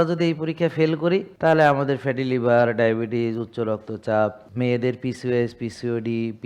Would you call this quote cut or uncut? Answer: cut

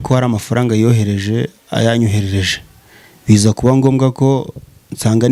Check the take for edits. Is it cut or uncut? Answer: uncut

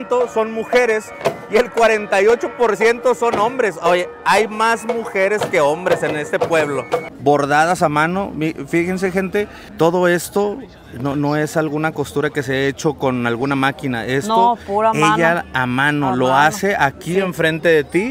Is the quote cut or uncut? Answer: cut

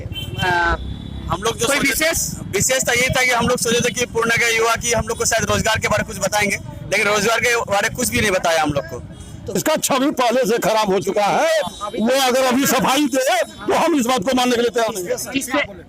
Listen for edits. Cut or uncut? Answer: cut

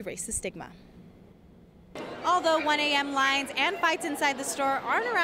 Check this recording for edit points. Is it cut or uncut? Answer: cut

